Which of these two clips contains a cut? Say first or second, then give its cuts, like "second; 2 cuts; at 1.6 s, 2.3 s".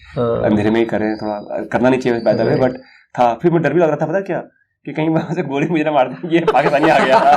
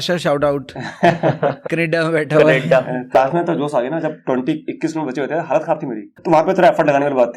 second; 2 cuts; at 3.1 s, 6.2 s